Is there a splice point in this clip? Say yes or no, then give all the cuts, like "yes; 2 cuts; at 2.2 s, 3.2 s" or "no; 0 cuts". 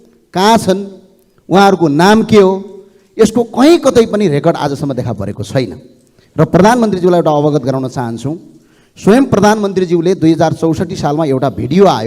no; 0 cuts